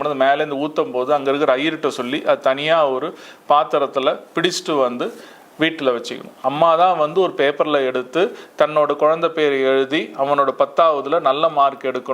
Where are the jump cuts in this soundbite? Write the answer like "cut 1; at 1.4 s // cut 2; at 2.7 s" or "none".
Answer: cut 1; at 6.4 s